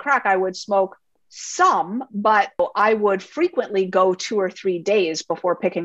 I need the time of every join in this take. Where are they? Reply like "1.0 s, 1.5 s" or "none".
1.2 s, 2.6 s